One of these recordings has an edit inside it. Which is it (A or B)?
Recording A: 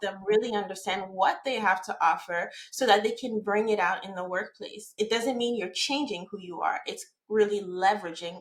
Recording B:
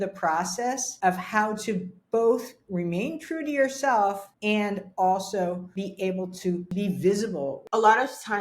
B